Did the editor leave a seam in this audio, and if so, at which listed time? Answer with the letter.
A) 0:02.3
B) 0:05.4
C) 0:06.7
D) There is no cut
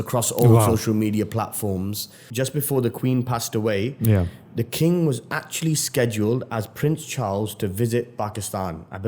A